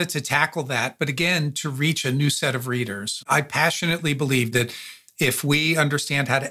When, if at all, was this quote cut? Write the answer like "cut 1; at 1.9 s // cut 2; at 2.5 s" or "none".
cut 1; at 3.2 s // cut 2; at 4.6 s